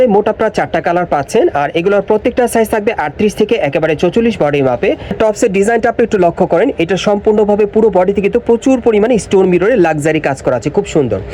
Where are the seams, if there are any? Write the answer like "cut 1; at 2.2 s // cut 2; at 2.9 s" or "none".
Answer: cut 1; at 5.1 s